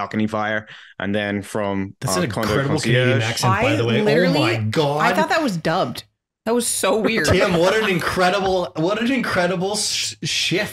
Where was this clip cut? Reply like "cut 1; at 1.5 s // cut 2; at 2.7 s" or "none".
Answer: none